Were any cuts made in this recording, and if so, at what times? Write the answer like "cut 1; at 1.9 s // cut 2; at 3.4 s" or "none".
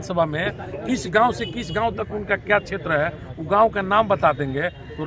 none